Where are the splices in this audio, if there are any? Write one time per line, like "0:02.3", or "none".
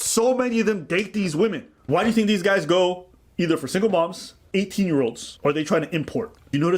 0:01.7
0:05.3